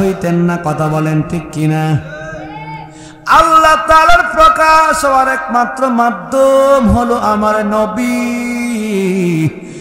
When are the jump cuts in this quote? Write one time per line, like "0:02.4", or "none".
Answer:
none